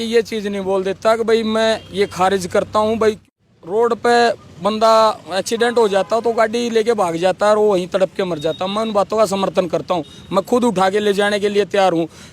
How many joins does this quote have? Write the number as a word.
one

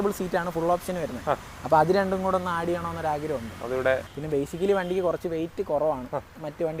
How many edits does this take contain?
one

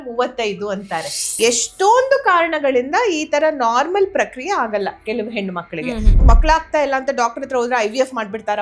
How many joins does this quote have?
two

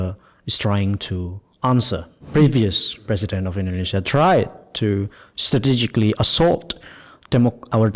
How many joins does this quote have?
one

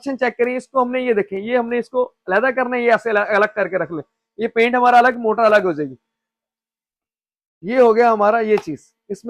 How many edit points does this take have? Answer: zero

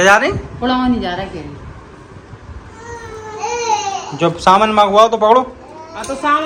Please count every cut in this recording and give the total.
zero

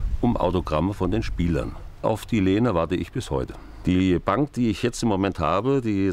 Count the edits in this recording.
two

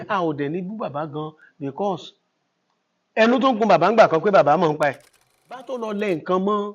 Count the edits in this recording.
one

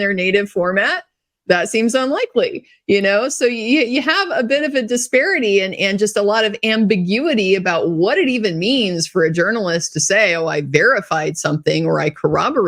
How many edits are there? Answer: zero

